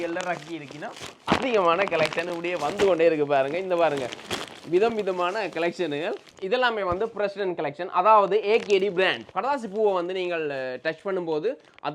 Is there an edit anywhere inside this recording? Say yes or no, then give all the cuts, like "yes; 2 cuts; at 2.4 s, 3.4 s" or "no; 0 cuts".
yes; 2 cuts; at 6.3 s, 9.2 s